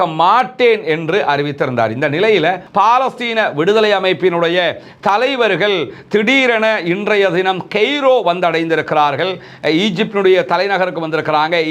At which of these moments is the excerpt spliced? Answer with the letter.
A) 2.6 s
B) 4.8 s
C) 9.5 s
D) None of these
A